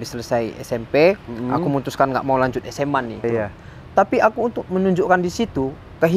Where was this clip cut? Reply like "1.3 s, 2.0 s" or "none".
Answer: 3.2 s

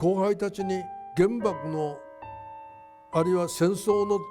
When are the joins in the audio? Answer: 1.0 s

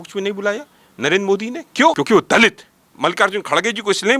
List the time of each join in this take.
2.0 s, 2.9 s

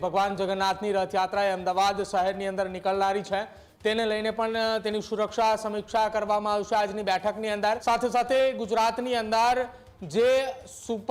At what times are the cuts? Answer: 7.8 s

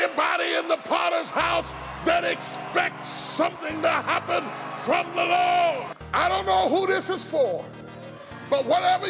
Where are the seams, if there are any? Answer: 5.9 s

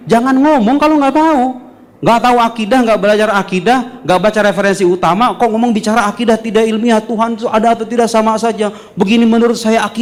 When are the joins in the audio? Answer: none

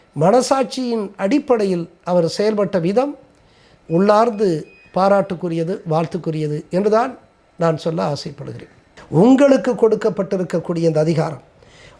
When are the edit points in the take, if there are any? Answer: 8.8 s

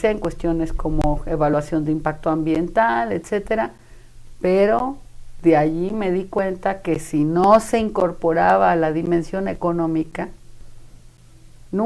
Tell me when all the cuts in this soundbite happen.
none

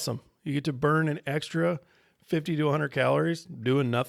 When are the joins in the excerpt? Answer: none

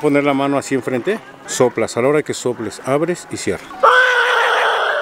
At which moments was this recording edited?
1.4 s, 3.7 s

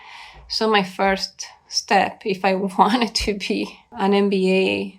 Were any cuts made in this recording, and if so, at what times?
3.8 s

